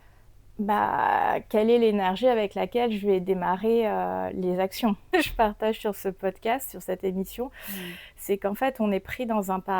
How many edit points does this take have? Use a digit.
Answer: 1